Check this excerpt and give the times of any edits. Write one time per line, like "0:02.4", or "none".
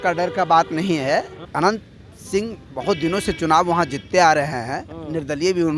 0:01.4